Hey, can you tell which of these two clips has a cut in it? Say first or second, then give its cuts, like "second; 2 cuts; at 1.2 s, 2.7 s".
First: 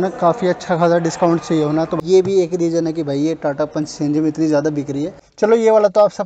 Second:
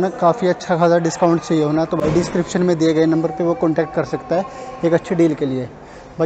first; 2 cuts; at 2.0 s, 5.2 s